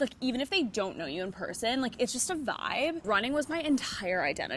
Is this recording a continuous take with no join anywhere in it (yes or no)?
no